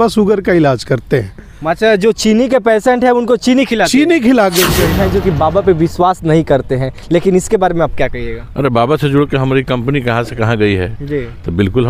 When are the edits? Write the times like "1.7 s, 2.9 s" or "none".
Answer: 4.9 s